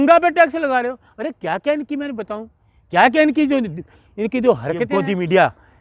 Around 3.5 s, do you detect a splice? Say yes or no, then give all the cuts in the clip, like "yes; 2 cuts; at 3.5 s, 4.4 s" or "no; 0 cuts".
no; 1 cut; at 4.9 s